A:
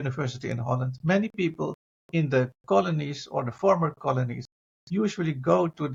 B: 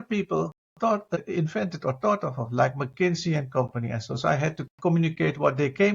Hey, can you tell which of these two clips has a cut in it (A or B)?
B